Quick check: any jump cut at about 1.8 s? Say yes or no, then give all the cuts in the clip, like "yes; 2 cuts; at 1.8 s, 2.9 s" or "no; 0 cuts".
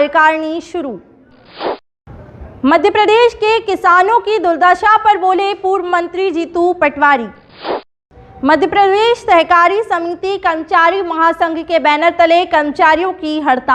yes; 2 cuts; at 1.8 s, 7.9 s